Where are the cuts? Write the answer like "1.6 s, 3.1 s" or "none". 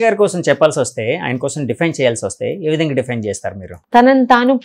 none